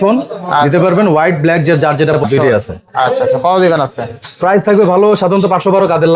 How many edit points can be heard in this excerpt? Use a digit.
1